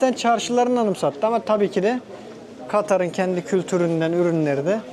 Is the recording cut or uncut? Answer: uncut